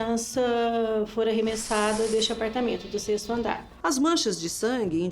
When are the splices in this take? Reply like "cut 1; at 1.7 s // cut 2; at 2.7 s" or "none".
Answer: cut 1; at 2.1 s // cut 2; at 3.7 s